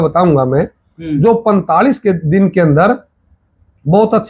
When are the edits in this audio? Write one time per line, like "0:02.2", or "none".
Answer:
none